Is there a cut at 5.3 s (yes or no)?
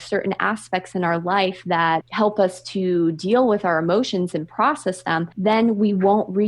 no